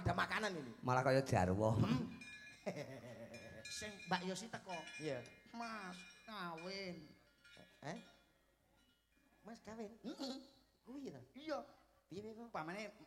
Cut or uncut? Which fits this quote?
uncut